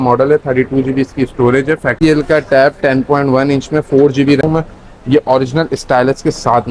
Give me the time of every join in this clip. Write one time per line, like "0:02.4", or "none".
0:01.9
0:04.4